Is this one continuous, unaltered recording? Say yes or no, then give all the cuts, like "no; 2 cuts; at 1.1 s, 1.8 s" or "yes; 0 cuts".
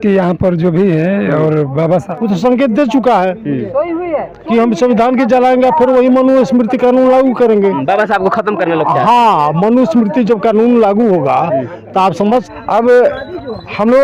no; 2 cuts; at 2.1 s, 12.4 s